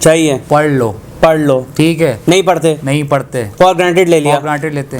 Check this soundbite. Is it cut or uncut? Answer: uncut